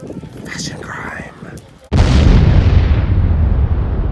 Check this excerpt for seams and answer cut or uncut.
cut